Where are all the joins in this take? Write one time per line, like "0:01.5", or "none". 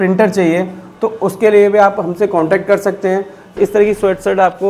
0:03.6